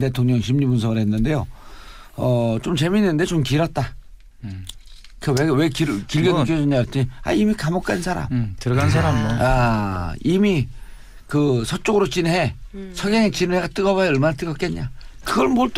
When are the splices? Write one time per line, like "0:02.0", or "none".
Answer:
none